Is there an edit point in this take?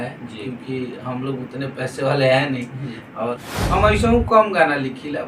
yes; 1 cut; at 3.3 s

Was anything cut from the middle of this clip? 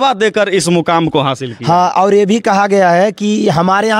no; 0 cuts

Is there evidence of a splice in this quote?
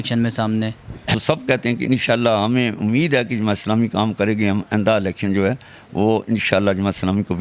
yes; 1 cut; at 1.1 s

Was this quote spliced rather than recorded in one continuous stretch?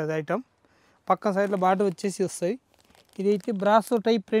no; 0 cuts

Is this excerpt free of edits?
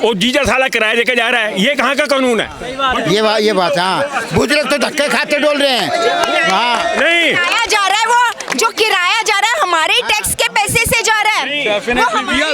yes; 0 cuts

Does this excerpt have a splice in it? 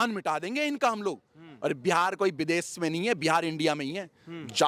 no; 0 cuts

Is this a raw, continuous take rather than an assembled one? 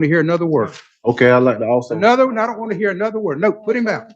yes; 0 cuts

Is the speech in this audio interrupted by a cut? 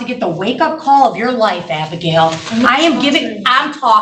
no; 0 cuts

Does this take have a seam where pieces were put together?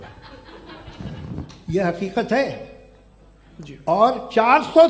no; 0 cuts

